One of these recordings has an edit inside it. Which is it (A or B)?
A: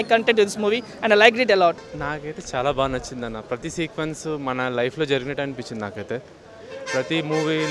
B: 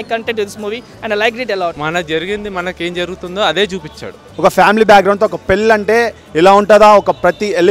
B